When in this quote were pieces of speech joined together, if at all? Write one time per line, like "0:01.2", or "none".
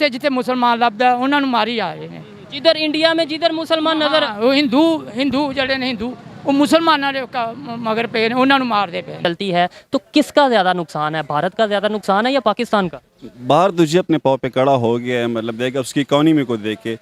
0:09.2